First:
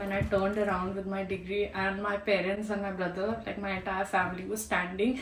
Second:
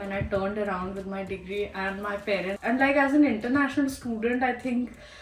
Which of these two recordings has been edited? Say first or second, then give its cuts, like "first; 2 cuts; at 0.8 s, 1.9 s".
second; 1 cut; at 2.5 s